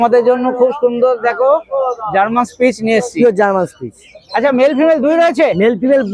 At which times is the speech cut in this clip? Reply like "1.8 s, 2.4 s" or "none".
none